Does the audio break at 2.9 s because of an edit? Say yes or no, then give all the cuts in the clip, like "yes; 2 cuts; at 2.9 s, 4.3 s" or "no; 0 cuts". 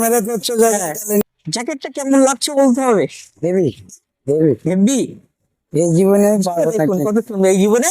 no; 1 cut; at 1.2 s